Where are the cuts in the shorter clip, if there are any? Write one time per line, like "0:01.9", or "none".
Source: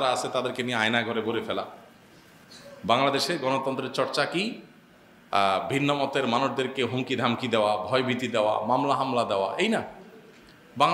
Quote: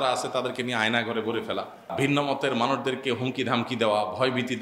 0:01.9